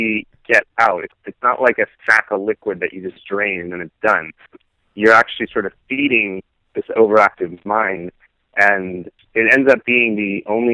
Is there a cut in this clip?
yes; 2 cuts; at 1.1 s, 9.2 s

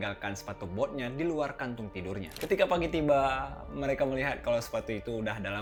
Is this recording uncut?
yes; 0 cuts

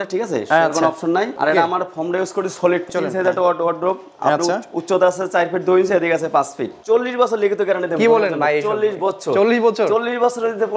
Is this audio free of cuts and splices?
no; 3 cuts; at 1.3 s, 2.9 s, 6.7 s

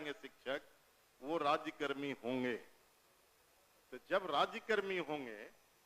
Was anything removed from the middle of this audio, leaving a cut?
no; 0 cuts

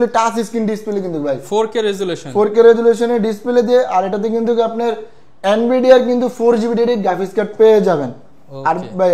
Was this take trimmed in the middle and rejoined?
no; 0 cuts

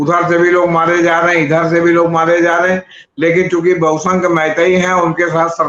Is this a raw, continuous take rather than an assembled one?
yes; 0 cuts

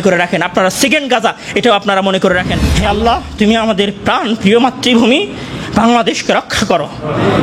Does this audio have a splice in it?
yes; 1 cut; at 2.7 s

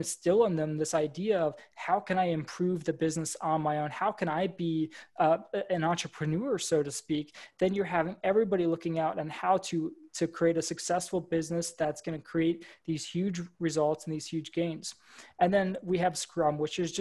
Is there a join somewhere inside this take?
no; 0 cuts

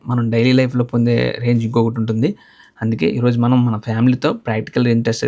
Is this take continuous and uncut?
yes; 0 cuts

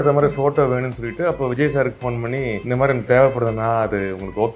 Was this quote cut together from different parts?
yes; 1 cut; at 2.6 s

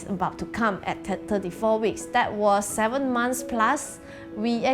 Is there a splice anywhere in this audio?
no; 0 cuts

